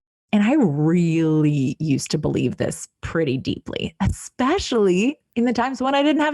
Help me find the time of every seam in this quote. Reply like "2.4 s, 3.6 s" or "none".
5.2 s